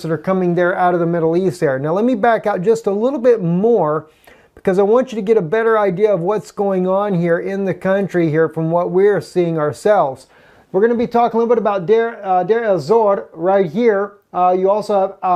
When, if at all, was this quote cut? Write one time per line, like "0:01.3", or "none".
none